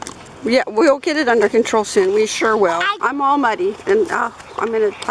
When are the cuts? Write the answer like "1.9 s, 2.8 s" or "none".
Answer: 3.0 s